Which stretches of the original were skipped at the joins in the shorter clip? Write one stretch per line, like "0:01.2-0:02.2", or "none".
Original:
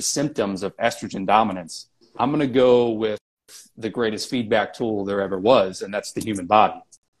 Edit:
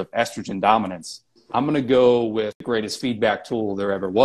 0:03.2-0:03.9